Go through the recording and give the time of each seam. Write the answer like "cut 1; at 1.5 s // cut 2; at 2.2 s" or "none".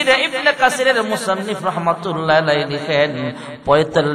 none